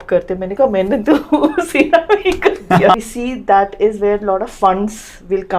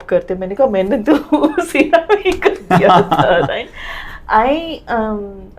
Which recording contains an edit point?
first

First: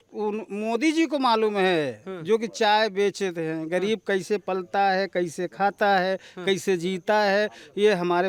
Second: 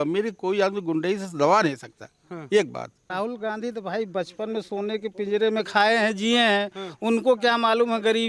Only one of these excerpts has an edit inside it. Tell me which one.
second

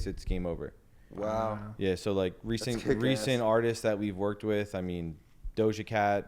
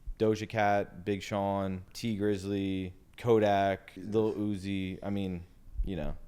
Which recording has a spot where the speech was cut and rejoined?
second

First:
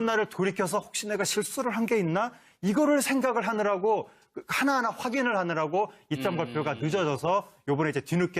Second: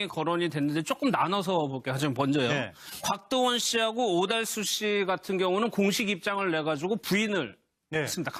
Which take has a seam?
first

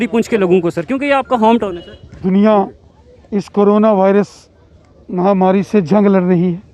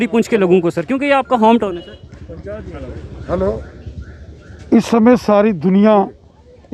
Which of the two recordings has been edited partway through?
first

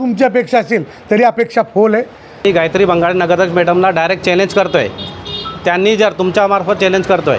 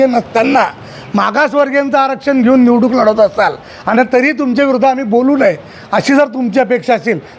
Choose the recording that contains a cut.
first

